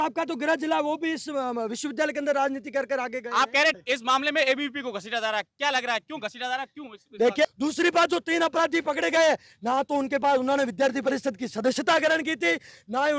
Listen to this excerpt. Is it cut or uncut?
cut